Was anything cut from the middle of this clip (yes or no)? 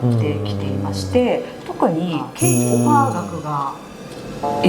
yes